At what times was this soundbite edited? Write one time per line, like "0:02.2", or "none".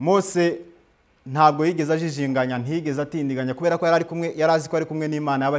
none